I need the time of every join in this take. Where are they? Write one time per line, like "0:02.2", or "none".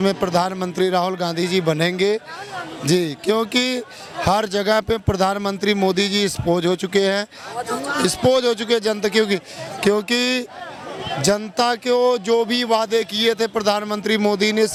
none